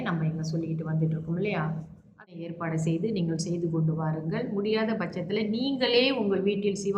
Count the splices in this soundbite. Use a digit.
1